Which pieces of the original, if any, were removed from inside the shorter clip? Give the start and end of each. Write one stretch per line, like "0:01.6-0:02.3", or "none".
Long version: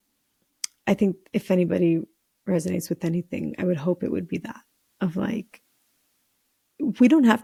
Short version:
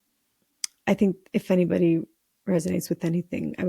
none